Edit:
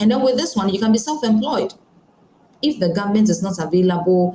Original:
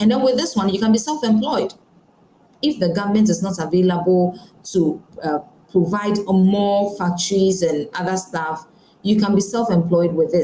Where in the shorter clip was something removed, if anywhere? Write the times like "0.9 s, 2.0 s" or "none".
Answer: none